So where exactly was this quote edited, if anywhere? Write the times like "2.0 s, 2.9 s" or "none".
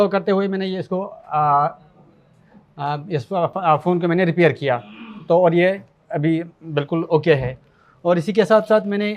none